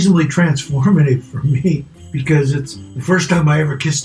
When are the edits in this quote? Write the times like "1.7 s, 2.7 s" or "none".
none

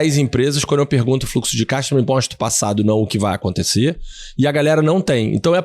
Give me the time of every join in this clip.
none

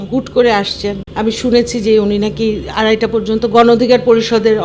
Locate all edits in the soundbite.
1.1 s

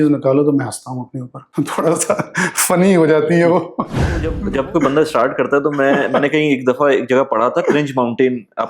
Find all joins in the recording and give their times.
1.5 s, 4.4 s

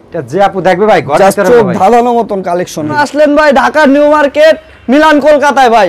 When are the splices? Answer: 3.0 s

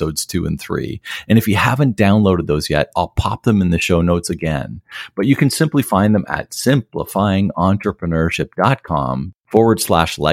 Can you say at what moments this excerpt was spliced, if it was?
9.3 s

